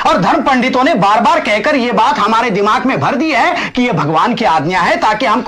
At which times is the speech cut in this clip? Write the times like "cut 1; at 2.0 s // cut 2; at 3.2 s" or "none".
none